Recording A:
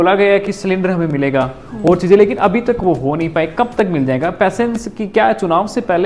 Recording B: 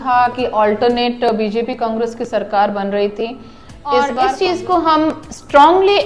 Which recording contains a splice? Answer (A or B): B